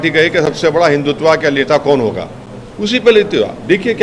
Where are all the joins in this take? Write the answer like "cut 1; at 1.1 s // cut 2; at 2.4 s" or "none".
none